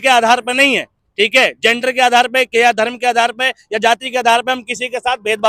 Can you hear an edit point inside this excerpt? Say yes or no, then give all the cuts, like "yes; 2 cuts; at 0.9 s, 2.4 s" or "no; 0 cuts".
no; 0 cuts